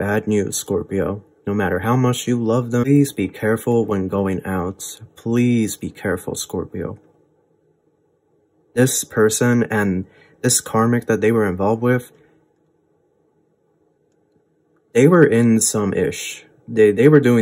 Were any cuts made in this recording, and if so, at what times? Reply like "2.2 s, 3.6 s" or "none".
2.9 s

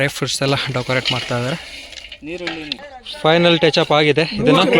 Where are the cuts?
none

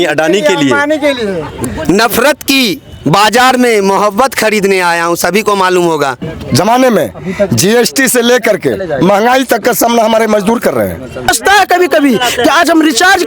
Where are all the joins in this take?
1.5 s, 6.2 s, 11.3 s

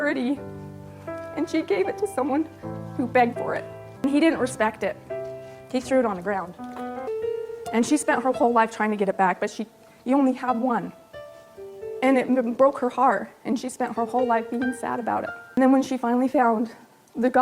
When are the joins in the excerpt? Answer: 4.0 s

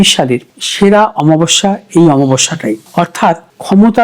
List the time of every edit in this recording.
none

